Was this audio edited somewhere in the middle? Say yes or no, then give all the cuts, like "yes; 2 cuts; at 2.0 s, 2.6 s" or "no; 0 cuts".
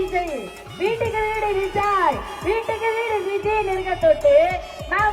no; 0 cuts